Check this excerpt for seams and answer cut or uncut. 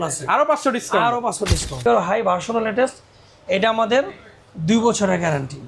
cut